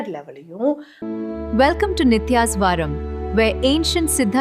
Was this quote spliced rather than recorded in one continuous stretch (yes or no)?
yes